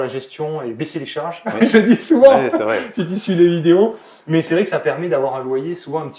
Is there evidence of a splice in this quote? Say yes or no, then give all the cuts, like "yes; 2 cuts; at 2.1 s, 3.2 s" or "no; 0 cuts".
no; 0 cuts